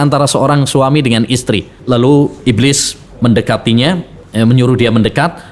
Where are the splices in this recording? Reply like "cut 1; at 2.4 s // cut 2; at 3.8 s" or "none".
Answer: cut 1; at 1.8 s // cut 2; at 2.4 s // cut 3; at 4.2 s